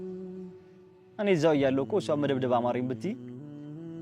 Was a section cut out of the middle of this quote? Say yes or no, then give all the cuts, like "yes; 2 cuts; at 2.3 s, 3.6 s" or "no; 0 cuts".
yes; 1 cut; at 0.9 s